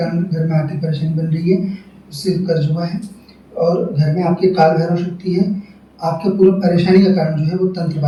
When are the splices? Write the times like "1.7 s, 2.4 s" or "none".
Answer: none

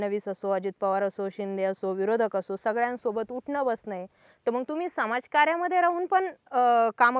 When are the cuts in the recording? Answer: none

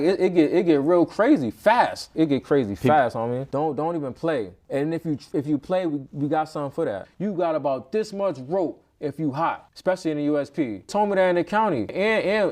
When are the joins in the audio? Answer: 2.1 s, 3.4 s, 4.6 s, 7.1 s, 9.7 s, 10.9 s

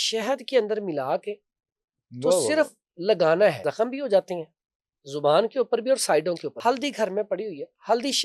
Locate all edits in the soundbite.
3.7 s, 6.5 s

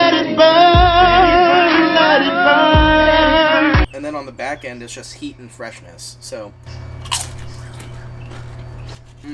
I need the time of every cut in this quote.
3.8 s

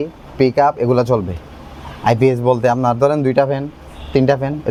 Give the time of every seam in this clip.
none

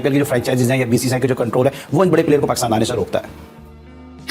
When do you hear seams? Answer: none

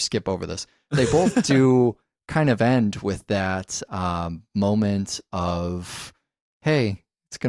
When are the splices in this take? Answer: 6.0 s

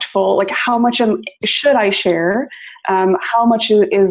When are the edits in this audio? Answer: none

